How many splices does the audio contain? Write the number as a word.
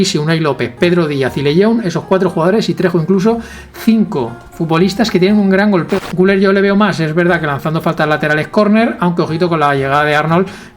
one